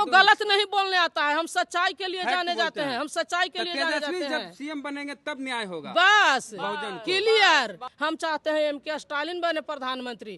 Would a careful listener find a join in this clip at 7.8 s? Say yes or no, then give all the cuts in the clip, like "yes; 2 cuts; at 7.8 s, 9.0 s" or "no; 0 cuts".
yes; 1 cut; at 7.8 s